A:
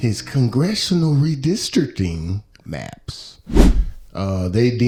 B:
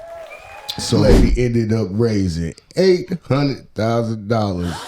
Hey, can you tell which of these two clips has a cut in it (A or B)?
B